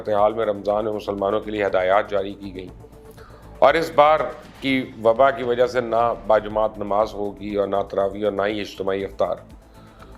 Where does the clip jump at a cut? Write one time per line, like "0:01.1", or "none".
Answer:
none